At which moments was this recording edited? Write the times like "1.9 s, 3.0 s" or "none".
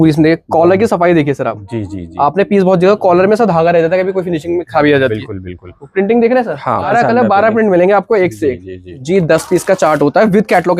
5.8 s, 6.9 s, 8.9 s